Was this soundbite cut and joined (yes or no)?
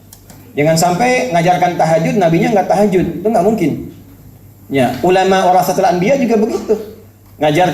no